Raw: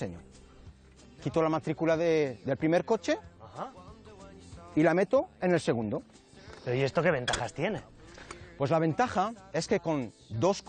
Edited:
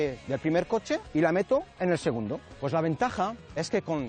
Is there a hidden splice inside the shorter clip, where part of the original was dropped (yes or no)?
yes